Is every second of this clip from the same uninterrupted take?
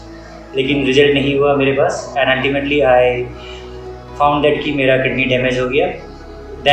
yes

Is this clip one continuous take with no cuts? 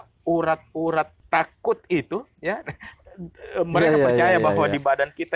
no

